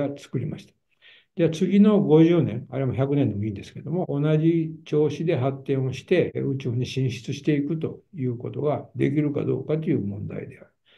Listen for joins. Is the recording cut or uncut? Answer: cut